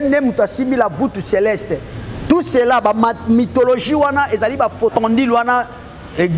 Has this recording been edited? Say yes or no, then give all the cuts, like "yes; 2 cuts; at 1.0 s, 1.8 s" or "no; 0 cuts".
yes; 1 cut; at 4.9 s